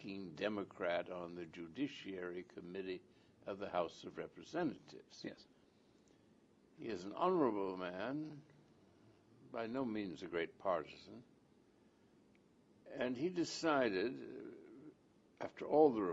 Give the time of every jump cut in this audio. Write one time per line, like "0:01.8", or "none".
0:00.9